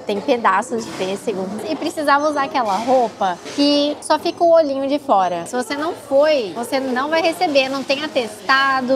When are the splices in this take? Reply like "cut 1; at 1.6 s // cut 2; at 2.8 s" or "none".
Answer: cut 1; at 1.6 s // cut 2; at 3.7 s // cut 3; at 5.5 s // cut 4; at 6.6 s